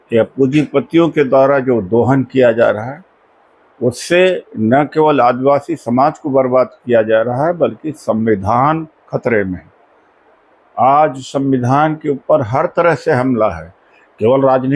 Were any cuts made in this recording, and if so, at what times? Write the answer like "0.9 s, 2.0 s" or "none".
none